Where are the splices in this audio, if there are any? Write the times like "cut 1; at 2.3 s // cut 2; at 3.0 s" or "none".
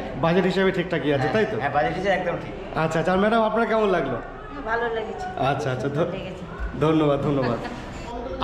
none